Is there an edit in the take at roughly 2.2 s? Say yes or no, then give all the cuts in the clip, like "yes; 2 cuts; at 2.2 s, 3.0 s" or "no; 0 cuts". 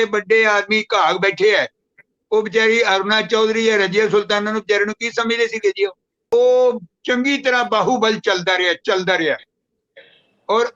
no; 1 cut; at 6.2 s